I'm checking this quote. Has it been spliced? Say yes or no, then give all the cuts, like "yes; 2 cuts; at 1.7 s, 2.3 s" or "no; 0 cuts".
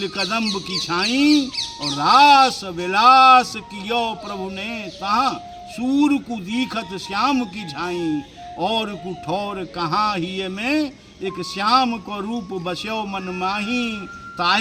no; 0 cuts